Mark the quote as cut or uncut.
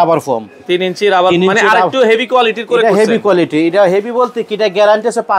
uncut